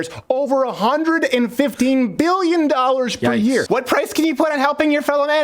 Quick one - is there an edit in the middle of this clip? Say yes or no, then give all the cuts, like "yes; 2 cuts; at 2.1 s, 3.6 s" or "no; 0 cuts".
yes; 1 cut; at 3.6 s